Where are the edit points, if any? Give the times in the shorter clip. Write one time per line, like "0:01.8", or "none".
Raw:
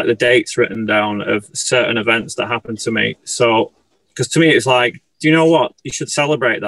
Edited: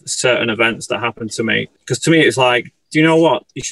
0:01.7